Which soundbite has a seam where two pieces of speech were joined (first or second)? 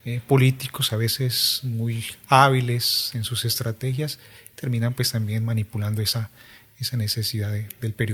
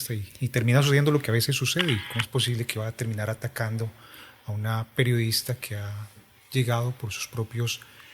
second